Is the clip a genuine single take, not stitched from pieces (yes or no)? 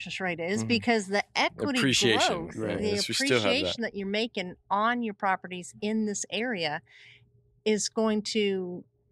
yes